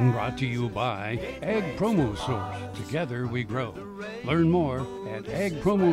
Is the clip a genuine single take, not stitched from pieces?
yes; 0 cuts

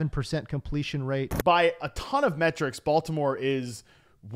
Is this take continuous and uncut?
no; 1 cut; at 1.3 s

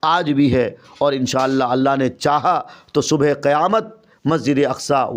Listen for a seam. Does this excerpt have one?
no; 0 cuts

